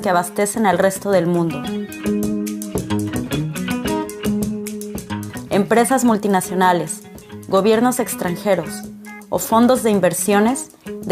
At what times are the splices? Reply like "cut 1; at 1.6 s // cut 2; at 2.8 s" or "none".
cut 1; at 5.0 s

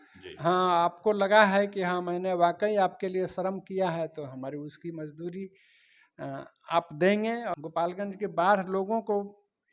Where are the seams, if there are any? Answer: cut 1; at 7.5 s

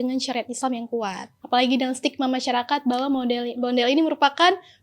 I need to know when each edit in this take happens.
cut 1; at 1.3 s

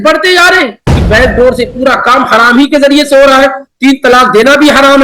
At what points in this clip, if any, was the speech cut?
cut 1; at 1.0 s

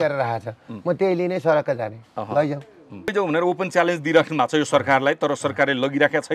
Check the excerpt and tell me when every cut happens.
cut 1; at 3.1 s

